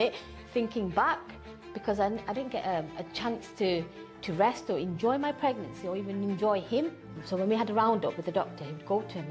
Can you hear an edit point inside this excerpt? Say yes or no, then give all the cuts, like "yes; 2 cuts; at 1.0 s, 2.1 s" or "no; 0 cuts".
yes; 1 cut; at 7.1 s